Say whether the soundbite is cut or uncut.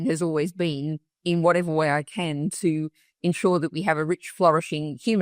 uncut